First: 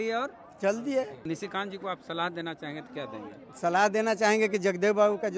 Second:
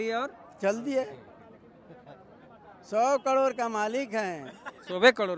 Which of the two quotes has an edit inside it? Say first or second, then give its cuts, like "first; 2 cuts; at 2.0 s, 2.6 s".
first; 1 cut; at 1.2 s